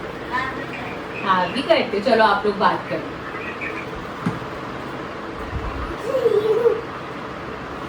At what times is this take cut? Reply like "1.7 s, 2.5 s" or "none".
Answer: none